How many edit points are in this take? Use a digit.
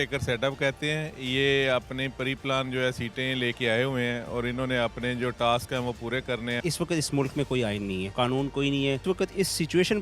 3